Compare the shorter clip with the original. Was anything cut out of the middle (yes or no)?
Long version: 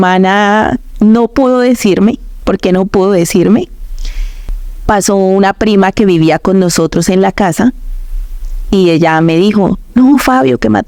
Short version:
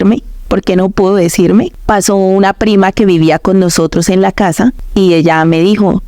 yes